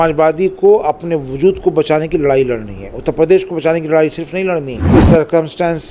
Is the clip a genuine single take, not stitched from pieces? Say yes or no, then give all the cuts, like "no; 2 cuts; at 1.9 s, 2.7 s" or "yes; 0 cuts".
no; 1 cut; at 4.8 s